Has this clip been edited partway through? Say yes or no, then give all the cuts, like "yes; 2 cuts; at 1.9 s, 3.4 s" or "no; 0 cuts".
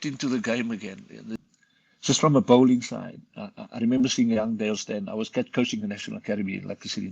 yes; 1 cut; at 1.4 s